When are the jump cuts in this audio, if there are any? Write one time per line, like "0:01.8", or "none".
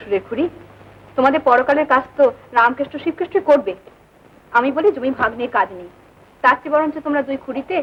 none